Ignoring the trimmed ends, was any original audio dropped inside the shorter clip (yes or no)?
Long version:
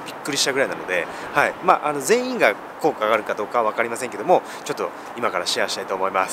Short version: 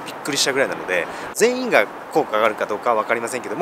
yes